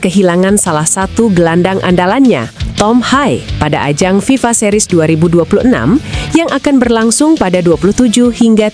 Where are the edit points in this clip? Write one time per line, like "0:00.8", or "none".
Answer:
none